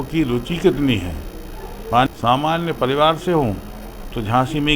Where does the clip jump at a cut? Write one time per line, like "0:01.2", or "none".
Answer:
0:02.1